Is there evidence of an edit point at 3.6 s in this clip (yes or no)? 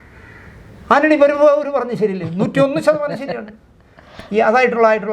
no